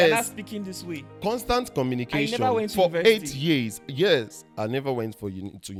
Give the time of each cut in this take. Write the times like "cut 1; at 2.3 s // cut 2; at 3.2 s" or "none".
none